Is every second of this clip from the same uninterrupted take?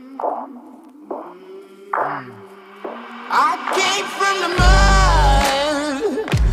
yes; 0 cuts

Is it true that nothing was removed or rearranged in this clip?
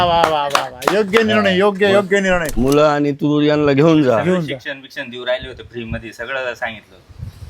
no; 1 cut; at 2.5 s

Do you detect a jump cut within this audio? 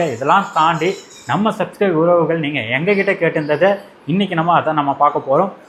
no; 0 cuts

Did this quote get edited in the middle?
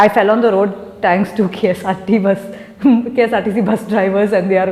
no; 0 cuts

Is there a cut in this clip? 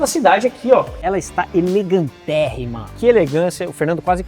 yes; 2 cuts; at 0.9 s, 2.9 s

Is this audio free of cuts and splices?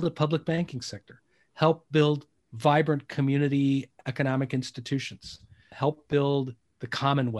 no; 1 cut; at 5.7 s

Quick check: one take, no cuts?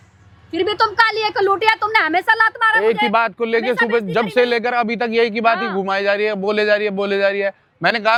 yes; 0 cuts

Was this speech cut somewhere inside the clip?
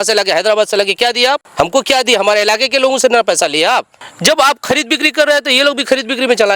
yes; 2 cuts; at 1.5 s, 4.0 s

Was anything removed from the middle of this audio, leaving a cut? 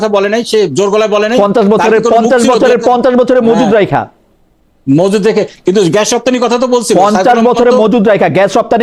no; 0 cuts

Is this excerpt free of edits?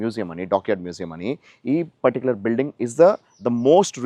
yes; 0 cuts

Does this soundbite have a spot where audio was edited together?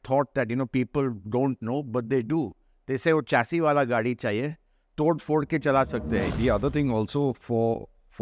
yes; 1 cut; at 6.3 s

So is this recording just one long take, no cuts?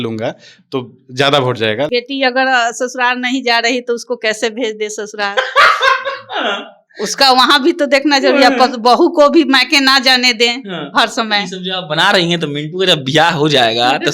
no; 1 cut; at 1.9 s

